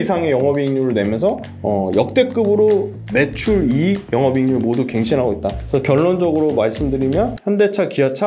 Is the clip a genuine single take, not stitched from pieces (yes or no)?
no